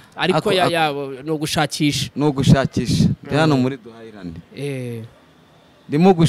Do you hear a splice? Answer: no; 0 cuts

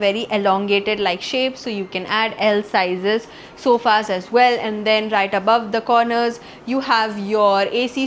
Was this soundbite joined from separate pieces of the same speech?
no; 0 cuts

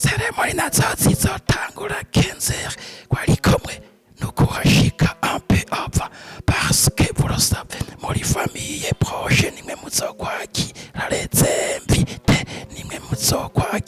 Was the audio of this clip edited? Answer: no; 0 cuts

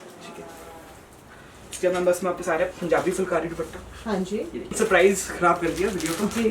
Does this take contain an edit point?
yes; 1 cut; at 4.8 s

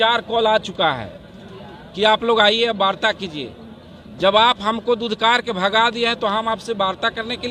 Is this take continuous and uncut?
yes; 0 cuts

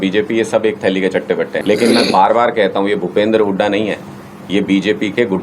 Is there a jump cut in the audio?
yes; 1 cut; at 1.6 s

